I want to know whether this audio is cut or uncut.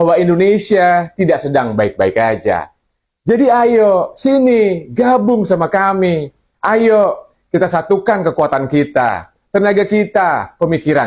uncut